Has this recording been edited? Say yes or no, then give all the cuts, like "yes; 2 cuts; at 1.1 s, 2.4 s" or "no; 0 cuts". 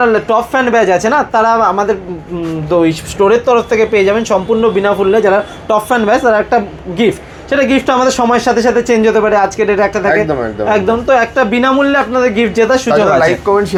no; 0 cuts